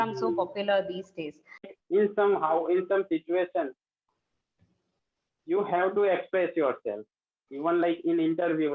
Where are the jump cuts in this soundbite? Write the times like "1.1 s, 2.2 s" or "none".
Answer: 1.7 s

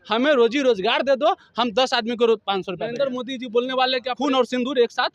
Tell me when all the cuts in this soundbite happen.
2.9 s, 4.1 s

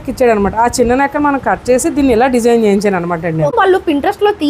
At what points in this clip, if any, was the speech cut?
3.5 s

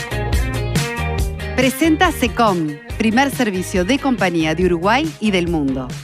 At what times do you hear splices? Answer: 1.5 s

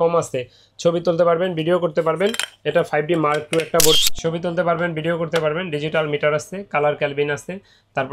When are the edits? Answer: 4.0 s

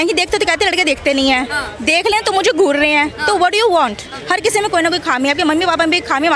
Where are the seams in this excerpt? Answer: 4.1 s

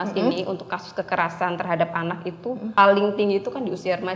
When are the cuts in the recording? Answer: 2.7 s

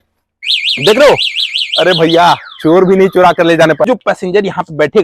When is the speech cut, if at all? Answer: 3.9 s

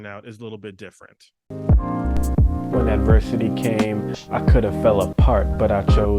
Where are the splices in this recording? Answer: 1.4 s

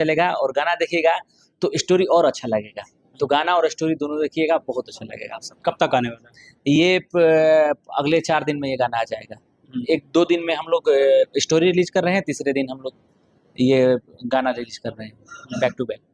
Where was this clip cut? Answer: none

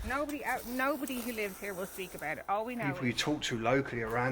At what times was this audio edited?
2.8 s

